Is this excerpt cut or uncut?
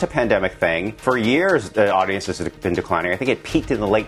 cut